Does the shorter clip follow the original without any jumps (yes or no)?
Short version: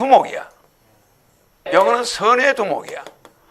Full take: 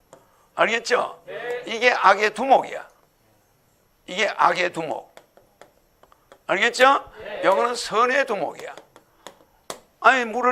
no